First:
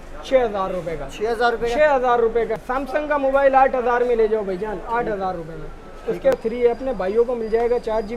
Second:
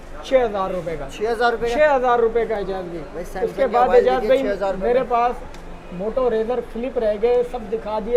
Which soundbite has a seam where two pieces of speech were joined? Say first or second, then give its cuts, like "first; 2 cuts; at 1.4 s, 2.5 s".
first; 2 cuts; at 2.6 s, 6.3 s